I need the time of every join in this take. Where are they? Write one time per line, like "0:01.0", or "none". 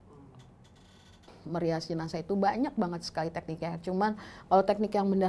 0:01.3